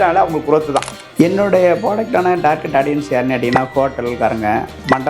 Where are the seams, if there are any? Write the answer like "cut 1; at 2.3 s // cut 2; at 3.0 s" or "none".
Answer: cut 1; at 1.0 s